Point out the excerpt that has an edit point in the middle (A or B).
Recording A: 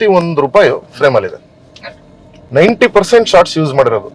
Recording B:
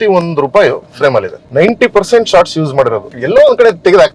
B